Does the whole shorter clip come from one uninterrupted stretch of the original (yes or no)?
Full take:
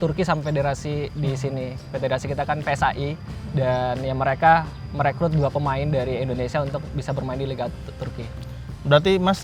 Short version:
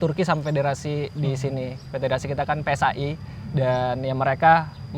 yes